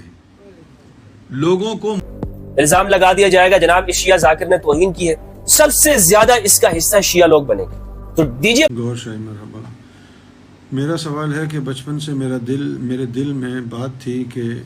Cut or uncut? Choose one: cut